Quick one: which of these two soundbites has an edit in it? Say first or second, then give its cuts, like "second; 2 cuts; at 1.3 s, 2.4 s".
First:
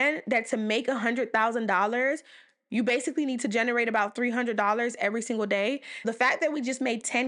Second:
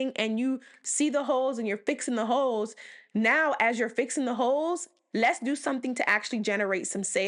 first; 1 cut; at 6.0 s